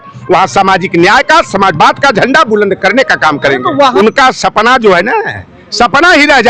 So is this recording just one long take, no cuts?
no; 1 cut; at 3.9 s

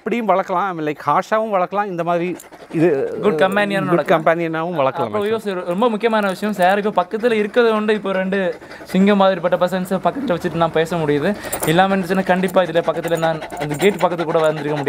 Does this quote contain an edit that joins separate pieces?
no; 0 cuts

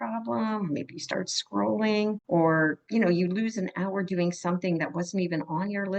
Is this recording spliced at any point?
yes; 2 cuts; at 2.2 s, 2.8 s

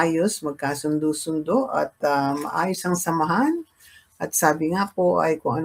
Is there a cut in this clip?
no; 0 cuts

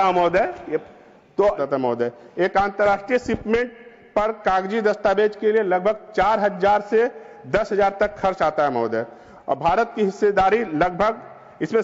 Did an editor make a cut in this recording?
yes; 1 cut; at 1.6 s

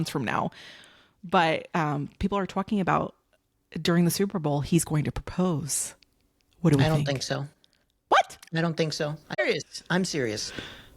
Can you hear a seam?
yes; 1 cut; at 9.4 s

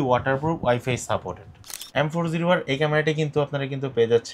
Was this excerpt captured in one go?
no; 1 cut; at 1.8 s

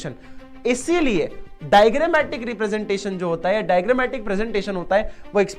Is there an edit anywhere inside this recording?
no; 0 cuts

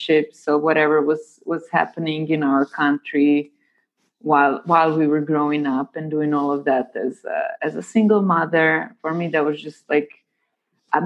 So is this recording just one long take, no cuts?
yes; 0 cuts

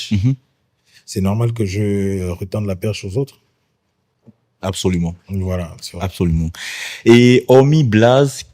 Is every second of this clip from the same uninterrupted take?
yes; 0 cuts

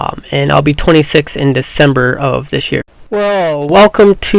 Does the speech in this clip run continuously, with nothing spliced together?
yes; 0 cuts

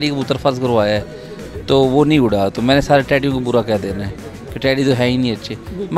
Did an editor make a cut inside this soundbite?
no; 0 cuts

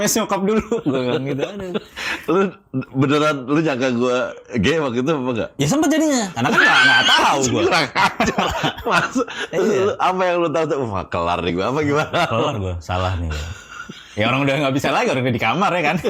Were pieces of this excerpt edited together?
no; 0 cuts

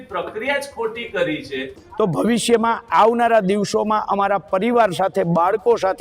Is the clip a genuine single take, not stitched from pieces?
no; 1 cut; at 1.8 s

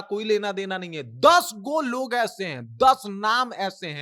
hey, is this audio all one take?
yes; 0 cuts

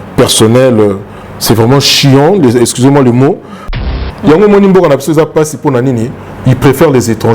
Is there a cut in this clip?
yes; 1 cut; at 3.7 s

